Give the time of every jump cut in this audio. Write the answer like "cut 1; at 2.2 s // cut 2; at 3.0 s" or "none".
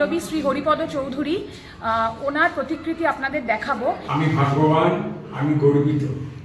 cut 1; at 4.0 s